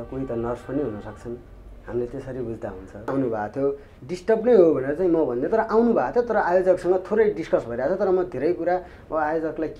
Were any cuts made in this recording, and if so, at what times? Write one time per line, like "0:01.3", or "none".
0:03.1